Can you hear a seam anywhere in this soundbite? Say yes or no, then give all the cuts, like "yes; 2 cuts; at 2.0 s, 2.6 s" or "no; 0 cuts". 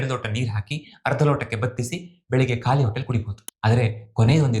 yes; 1 cut; at 3.4 s